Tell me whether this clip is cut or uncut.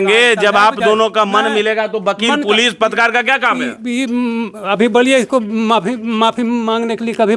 uncut